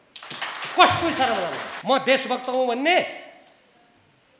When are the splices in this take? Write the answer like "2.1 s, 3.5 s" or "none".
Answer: 1.7 s

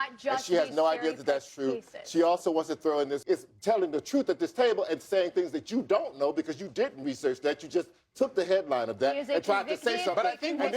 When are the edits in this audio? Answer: 3.2 s

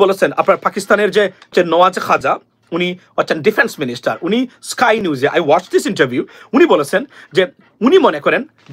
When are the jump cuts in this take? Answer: 1.5 s

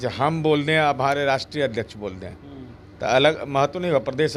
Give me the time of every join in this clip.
none

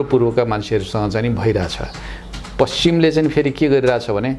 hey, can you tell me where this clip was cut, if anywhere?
none

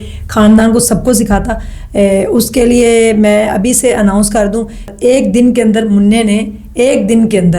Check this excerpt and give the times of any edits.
4.9 s

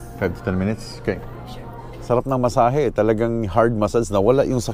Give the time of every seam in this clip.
2.0 s

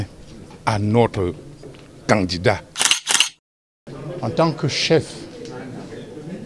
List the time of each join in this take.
3.2 s

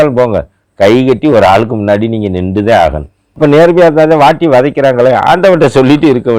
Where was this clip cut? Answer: 3.2 s

